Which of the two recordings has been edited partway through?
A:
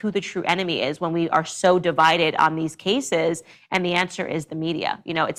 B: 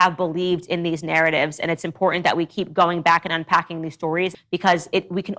B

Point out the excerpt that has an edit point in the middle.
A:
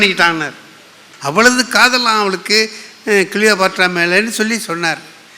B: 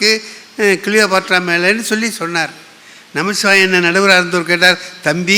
A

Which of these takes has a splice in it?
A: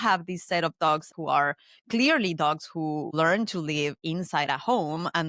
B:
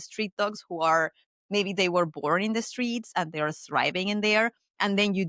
A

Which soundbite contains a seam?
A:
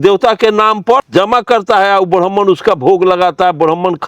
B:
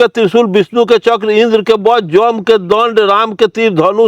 A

